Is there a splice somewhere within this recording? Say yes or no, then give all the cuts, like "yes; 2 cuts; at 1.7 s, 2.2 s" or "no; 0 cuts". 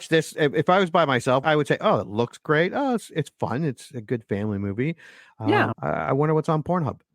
yes; 1 cut; at 1.4 s